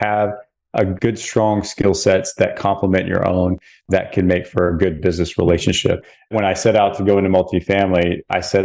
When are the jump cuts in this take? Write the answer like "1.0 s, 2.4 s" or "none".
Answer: 3.7 s, 6.3 s